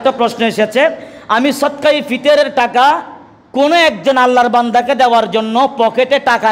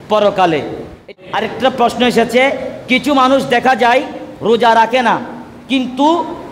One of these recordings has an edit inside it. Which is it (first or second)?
second